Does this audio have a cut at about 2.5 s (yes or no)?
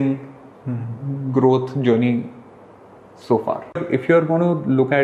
no